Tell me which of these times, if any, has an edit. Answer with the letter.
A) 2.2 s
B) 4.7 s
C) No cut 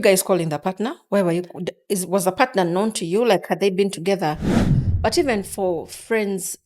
B